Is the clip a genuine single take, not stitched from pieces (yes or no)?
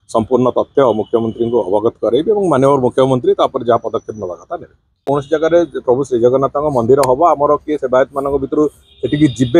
no